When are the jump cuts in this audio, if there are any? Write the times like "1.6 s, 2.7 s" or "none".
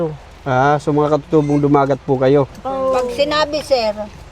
2.7 s